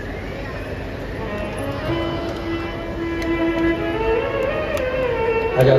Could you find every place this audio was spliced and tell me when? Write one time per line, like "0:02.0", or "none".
none